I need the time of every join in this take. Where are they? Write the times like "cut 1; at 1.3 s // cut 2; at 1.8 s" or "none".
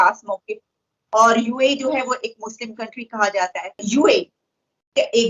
cut 1; at 3.7 s